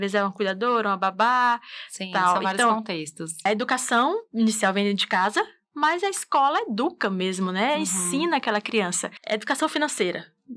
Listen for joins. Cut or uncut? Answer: cut